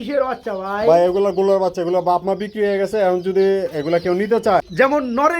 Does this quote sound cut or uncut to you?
cut